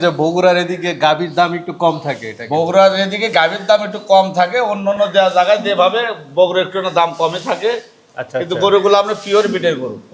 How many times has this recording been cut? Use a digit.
0